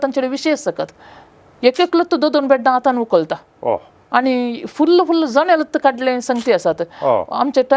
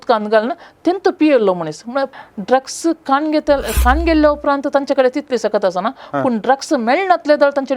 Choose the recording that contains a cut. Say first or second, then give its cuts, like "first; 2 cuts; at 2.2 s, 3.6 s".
second; 1 cut; at 2.1 s